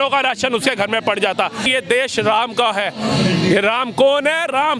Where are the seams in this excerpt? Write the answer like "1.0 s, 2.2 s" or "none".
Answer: 1.6 s